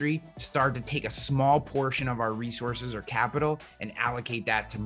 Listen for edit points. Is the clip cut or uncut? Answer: uncut